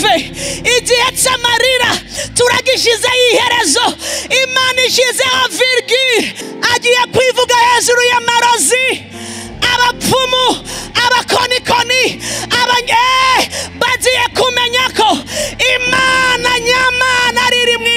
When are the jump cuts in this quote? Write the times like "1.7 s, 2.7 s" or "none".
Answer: 6.4 s